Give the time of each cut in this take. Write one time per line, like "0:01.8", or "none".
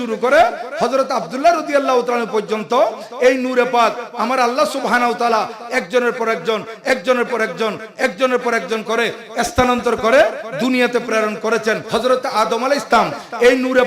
0:11.8